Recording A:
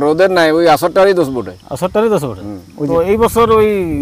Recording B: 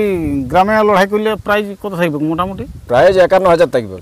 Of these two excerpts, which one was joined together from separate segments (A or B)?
A